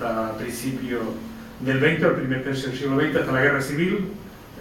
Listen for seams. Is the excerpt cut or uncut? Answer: cut